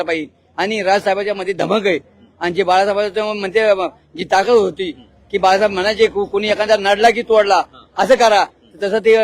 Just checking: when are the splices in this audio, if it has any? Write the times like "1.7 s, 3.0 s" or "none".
none